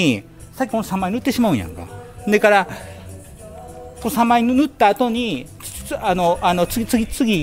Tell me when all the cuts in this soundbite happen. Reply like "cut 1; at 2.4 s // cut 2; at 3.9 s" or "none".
none